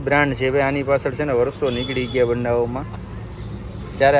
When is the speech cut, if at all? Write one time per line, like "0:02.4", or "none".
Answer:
none